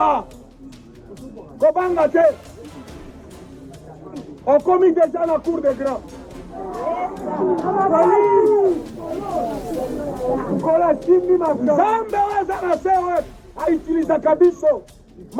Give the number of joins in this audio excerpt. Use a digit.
0